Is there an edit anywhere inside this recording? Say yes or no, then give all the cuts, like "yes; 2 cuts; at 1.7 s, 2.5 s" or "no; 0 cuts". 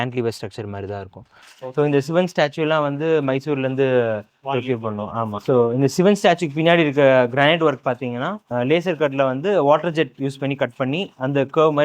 yes; 1 cut; at 1.5 s